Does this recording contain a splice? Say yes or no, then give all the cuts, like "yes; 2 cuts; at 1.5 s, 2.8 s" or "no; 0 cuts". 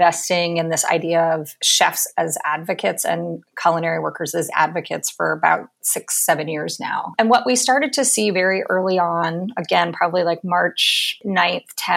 yes; 2 cuts; at 7.1 s, 11.1 s